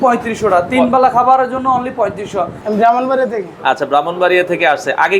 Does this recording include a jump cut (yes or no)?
yes